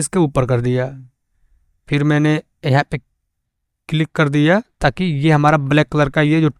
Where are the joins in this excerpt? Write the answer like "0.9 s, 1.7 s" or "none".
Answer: none